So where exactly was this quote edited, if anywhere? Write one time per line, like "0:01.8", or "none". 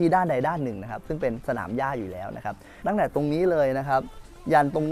0:02.8